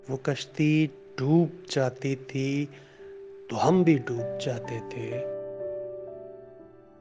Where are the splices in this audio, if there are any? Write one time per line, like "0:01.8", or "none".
0:04.9